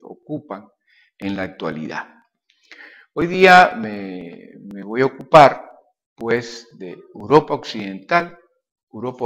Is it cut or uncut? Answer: cut